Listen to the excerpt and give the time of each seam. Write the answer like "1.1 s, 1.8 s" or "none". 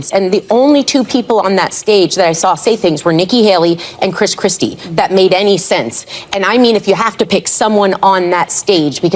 6.5 s